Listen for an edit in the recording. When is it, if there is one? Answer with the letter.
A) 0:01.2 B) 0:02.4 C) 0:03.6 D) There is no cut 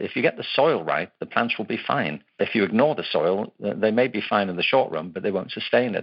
B